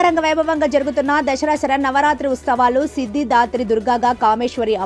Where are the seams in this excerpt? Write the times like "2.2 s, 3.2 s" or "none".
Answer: none